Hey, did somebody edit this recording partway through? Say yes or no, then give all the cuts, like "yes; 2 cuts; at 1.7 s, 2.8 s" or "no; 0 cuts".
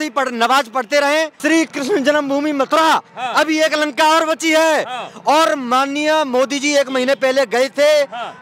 yes; 1 cut; at 1.3 s